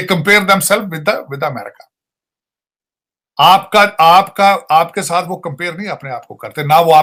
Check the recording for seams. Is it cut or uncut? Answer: uncut